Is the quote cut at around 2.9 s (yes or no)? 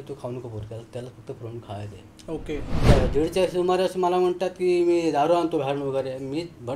yes